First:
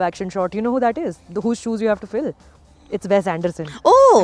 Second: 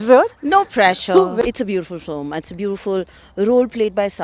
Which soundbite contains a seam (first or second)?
second